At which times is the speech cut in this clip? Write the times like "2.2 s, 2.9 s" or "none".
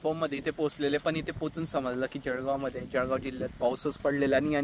none